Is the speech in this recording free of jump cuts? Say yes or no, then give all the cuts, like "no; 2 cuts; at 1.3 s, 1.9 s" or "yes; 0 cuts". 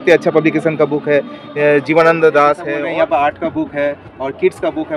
no; 1 cut; at 2.6 s